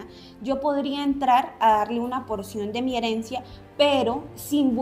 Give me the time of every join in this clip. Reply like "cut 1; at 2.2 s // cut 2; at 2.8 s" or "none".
none